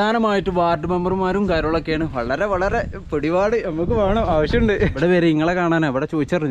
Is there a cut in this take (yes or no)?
yes